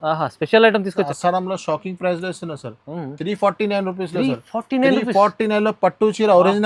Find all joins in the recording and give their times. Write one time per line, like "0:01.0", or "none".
0:01.1